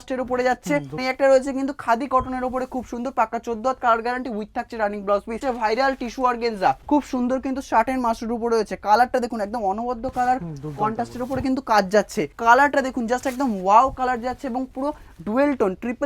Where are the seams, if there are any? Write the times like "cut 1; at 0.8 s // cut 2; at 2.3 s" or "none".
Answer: cut 1; at 1.0 s // cut 2; at 5.4 s // cut 3; at 6.8 s // cut 4; at 12.3 s